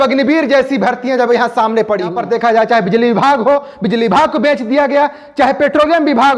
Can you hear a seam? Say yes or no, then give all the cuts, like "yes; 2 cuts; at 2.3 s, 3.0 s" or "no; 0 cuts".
yes; 1 cut; at 2.2 s